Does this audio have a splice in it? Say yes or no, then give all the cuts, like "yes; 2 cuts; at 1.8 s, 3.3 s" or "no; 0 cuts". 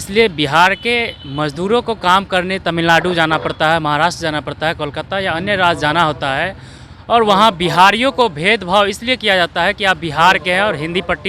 no; 0 cuts